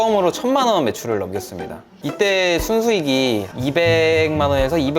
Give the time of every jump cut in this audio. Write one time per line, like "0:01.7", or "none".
0:02.0